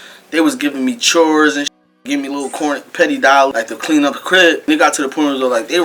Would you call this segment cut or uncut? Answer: cut